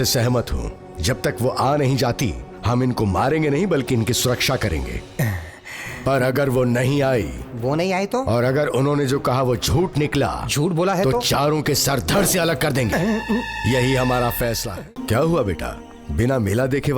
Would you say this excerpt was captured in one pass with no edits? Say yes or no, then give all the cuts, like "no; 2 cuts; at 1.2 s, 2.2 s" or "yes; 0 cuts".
no; 1 cut; at 14.7 s